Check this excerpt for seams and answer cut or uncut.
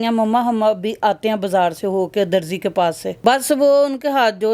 cut